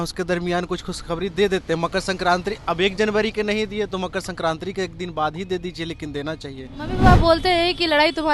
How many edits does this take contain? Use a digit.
1